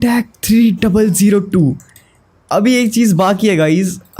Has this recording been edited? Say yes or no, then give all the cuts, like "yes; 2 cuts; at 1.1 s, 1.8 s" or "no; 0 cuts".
no; 0 cuts